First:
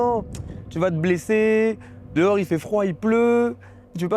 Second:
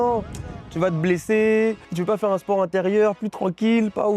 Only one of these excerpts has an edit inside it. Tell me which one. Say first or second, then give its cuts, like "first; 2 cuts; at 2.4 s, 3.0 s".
second; 1 cut; at 1.9 s